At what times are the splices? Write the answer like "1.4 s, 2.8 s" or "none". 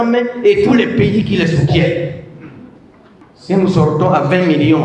none